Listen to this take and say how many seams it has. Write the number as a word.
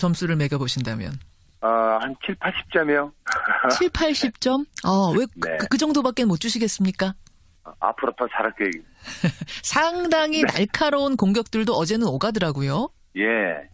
one